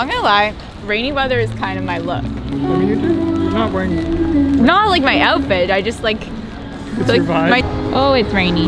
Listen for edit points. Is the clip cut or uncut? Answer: uncut